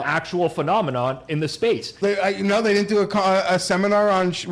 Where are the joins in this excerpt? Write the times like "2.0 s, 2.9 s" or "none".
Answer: 1.9 s